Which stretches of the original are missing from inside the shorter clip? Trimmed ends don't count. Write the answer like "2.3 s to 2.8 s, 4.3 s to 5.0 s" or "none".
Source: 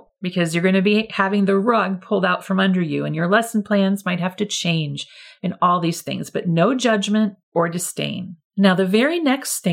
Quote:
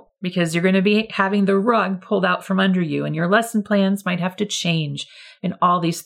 none